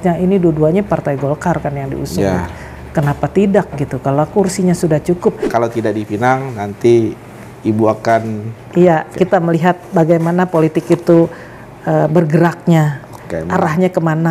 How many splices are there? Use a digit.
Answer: 2